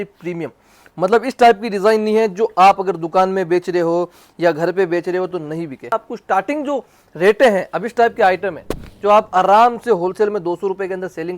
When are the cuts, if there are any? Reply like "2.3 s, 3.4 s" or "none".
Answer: 5.9 s